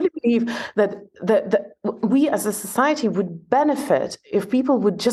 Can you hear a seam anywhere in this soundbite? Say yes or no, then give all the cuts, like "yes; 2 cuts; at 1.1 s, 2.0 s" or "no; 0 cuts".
no; 0 cuts